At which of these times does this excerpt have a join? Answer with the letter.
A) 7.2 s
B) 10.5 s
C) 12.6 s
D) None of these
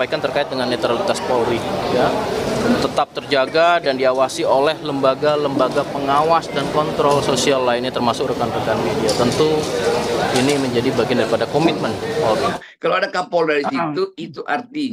C